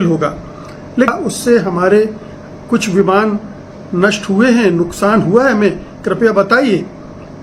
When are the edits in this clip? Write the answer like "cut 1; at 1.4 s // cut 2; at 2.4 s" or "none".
cut 1; at 1.1 s